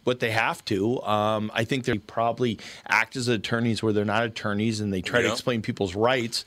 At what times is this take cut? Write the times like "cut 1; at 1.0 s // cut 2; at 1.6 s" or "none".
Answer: cut 1; at 1.9 s